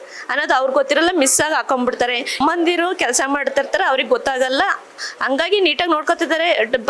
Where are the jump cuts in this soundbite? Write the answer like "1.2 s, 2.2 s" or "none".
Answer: 2.4 s